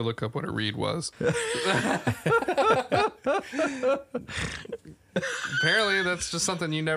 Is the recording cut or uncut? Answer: cut